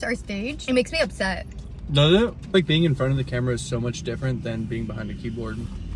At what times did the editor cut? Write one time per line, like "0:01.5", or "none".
0:02.4

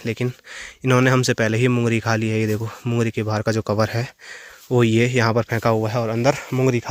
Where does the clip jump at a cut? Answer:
none

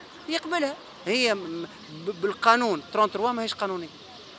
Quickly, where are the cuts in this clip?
0:00.9

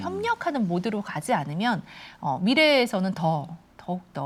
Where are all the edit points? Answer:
none

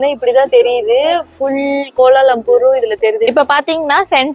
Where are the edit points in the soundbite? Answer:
0:03.3

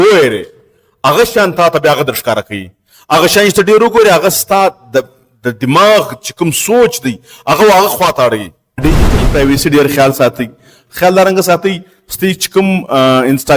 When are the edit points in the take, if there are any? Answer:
0:08.8

